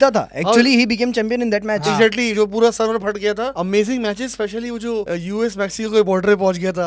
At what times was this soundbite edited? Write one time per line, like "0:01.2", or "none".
0:03.5
0:05.1